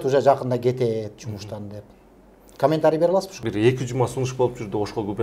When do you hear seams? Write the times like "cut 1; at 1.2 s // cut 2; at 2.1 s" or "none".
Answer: cut 1; at 3.4 s